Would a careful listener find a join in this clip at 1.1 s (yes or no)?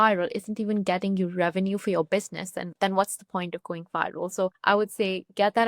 no